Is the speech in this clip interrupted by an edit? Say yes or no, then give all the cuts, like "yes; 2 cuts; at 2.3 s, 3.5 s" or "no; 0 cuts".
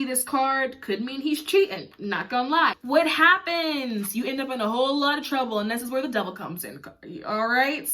yes; 1 cut; at 2.8 s